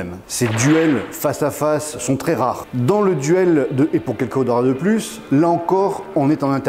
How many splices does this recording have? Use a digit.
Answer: 1